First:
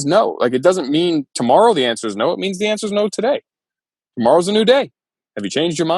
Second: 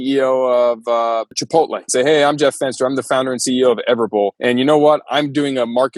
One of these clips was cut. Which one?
second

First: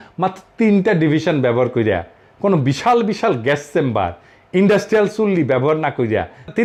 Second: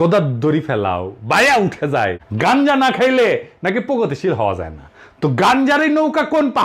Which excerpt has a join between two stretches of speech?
second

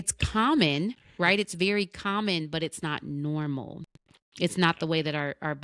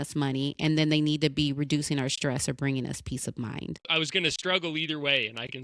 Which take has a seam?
second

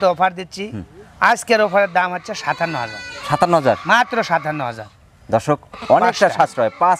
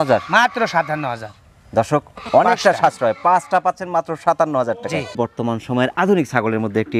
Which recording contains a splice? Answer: second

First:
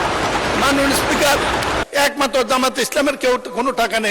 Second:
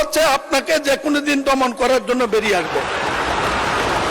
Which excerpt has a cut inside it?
first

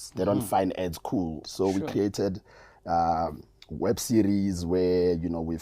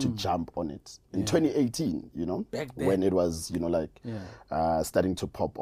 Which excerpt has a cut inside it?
first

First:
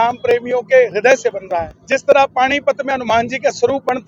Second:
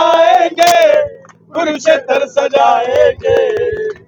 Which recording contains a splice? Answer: first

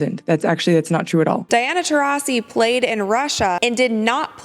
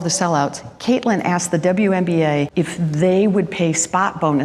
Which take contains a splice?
first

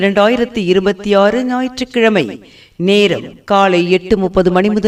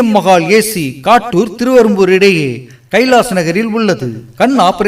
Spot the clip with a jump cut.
second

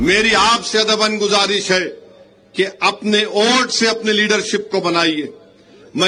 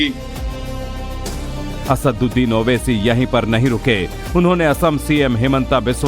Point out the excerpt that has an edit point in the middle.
second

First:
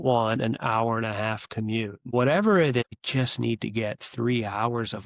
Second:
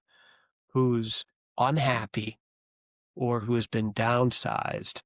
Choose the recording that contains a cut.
first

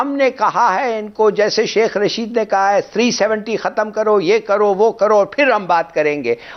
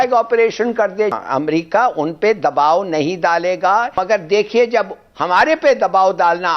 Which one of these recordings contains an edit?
second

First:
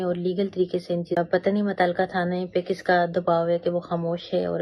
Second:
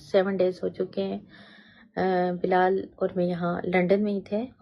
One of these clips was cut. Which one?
first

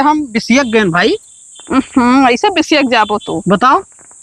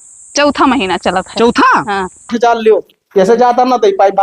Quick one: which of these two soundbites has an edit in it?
second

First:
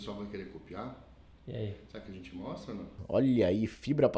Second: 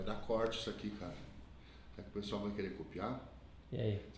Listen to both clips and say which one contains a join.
first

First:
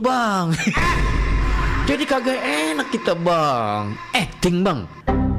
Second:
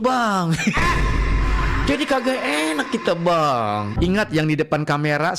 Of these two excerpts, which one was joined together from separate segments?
second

